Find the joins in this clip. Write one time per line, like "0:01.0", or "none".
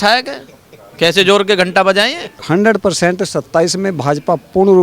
0:02.3